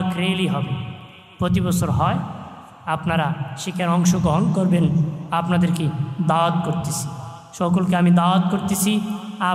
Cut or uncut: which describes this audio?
uncut